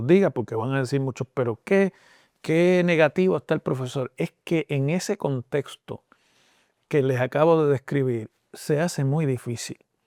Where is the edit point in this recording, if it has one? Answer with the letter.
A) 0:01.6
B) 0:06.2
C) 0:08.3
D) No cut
D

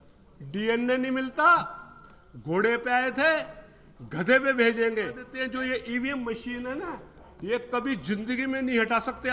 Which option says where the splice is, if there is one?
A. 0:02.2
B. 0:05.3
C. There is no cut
B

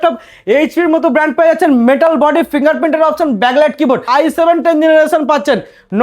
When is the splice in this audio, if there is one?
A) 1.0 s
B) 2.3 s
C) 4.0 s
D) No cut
C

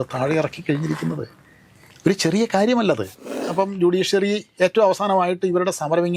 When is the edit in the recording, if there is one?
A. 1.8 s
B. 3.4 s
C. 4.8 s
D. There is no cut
B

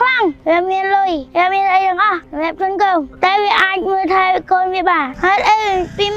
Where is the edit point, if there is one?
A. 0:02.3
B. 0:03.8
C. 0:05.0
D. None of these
C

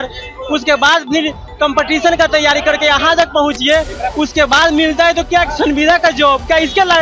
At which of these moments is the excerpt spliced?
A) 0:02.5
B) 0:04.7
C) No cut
C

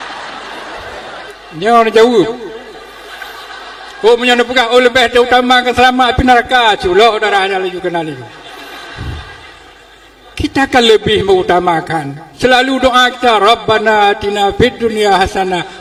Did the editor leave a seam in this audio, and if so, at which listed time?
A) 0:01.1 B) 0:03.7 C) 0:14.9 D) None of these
D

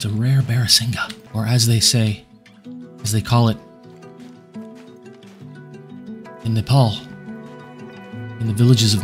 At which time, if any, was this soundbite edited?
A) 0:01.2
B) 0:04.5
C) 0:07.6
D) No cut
A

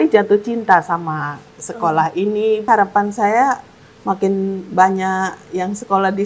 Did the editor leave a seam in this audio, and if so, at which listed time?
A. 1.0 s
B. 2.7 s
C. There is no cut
B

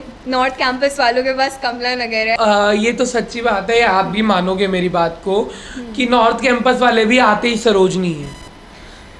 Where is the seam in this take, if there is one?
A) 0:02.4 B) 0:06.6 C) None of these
A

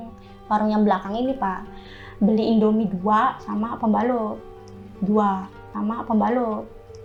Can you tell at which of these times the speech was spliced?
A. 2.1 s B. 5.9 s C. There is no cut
C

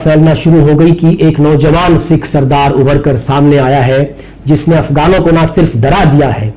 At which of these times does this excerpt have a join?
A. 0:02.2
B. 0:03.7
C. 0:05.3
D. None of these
D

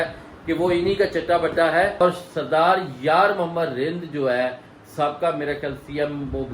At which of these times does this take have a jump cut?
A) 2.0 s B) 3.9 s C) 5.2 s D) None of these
A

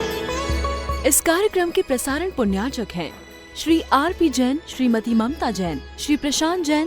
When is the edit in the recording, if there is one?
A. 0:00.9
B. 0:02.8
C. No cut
A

